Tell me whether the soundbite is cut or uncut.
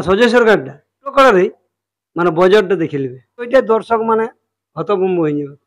cut